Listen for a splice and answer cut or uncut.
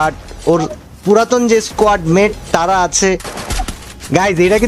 cut